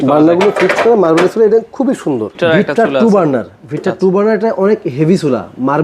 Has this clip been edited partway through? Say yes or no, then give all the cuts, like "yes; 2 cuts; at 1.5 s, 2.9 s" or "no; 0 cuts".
yes; 1 cut; at 2.4 s